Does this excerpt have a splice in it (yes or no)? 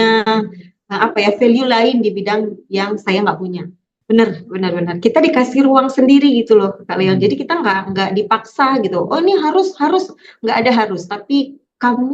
yes